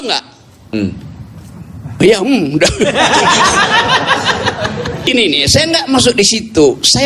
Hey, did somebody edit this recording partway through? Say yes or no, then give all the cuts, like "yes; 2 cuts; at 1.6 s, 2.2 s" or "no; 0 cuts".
yes; 1 cut; at 5.1 s